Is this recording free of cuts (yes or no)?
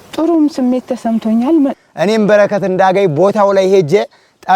no